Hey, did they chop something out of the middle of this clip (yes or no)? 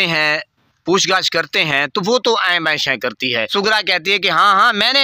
yes